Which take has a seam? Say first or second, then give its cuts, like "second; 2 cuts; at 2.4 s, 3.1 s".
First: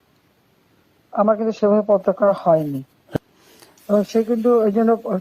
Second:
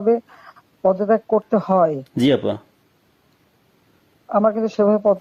first; 1 cut; at 3.0 s